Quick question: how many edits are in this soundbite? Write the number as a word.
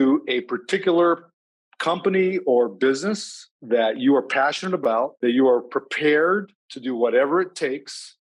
one